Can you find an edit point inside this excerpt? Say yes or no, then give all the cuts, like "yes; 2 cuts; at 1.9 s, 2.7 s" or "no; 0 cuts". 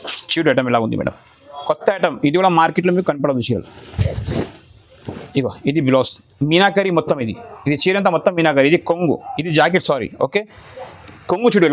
no; 0 cuts